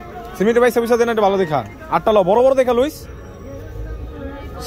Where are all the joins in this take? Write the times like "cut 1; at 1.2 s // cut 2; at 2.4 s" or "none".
none